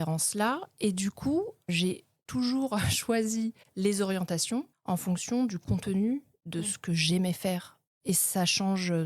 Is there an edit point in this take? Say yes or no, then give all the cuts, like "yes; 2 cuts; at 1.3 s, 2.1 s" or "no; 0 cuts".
yes; 3 cuts; at 1.7 s, 3.6 s, 4.7 s